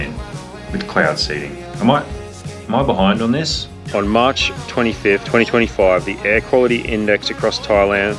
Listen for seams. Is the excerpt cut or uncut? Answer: cut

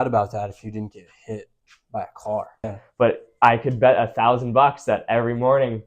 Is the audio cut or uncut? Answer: cut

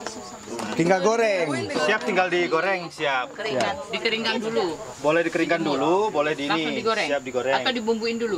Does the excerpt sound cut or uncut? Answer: uncut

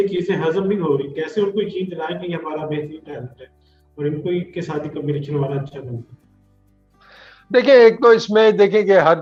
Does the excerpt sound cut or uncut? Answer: uncut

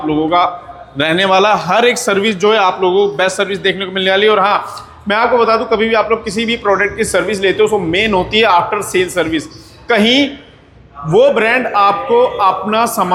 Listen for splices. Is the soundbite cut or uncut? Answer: uncut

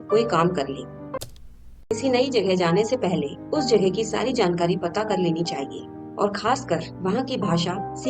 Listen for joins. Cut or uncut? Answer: cut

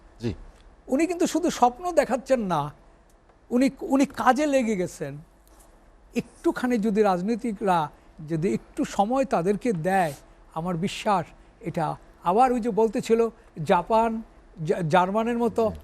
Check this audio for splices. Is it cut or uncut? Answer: uncut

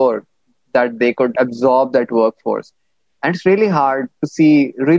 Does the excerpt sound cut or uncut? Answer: cut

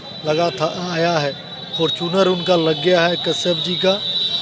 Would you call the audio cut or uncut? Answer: uncut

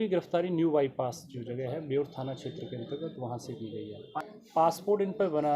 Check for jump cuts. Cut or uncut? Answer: cut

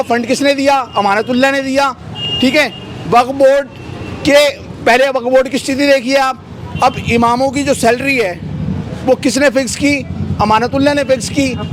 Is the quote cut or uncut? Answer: uncut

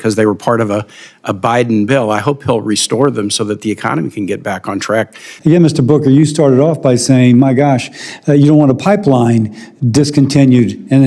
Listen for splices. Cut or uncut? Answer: cut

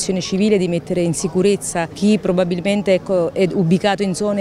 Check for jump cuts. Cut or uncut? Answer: cut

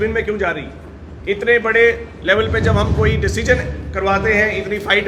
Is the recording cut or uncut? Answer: uncut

